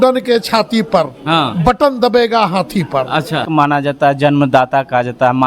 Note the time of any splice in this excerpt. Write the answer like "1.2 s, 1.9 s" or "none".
3.5 s